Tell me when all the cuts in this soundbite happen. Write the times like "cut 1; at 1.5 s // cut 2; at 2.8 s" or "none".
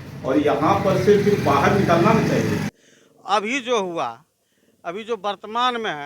cut 1; at 2.6 s